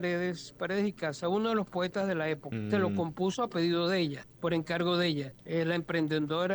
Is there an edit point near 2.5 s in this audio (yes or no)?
yes